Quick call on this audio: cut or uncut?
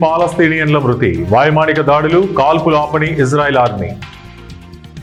uncut